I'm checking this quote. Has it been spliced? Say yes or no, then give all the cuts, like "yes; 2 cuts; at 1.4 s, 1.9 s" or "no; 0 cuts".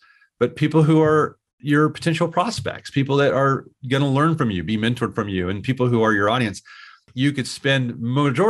yes; 1 cut; at 7.0 s